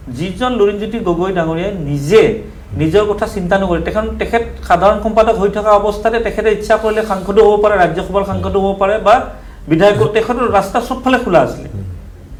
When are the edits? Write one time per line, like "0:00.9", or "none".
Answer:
none